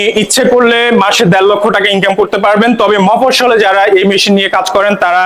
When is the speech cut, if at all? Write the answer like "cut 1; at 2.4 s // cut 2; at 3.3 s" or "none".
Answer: none

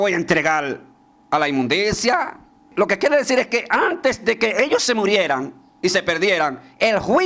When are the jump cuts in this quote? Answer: cut 1; at 2.6 s

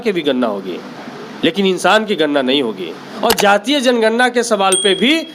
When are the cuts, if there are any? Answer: cut 1; at 3.0 s

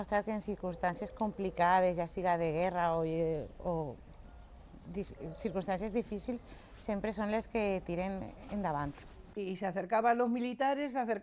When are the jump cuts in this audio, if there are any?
cut 1; at 9.3 s

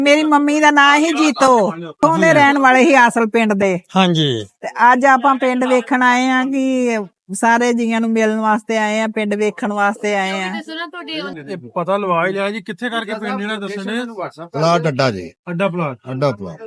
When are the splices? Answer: cut 1; at 2.0 s // cut 2; at 11.2 s

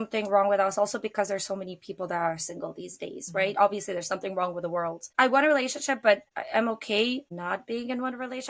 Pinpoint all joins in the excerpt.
cut 1; at 5.0 s // cut 2; at 6.3 s // cut 3; at 7.3 s

